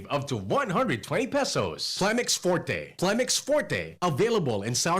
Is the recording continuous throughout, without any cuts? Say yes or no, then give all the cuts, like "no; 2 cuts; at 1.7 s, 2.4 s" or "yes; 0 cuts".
no; 1 cut; at 1.9 s